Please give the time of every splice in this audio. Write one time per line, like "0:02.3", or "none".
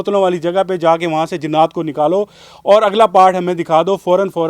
none